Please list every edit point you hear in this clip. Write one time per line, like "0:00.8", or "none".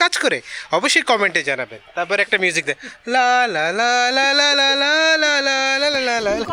none